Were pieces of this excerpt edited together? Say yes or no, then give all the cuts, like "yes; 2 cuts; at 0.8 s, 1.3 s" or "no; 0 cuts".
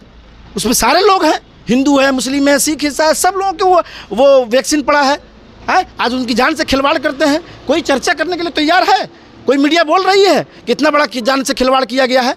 no; 0 cuts